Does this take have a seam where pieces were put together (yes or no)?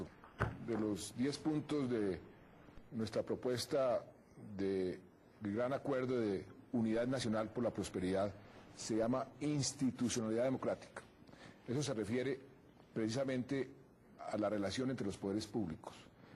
no